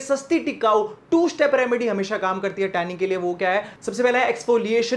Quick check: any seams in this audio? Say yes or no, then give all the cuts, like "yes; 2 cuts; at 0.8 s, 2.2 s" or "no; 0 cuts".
no; 0 cuts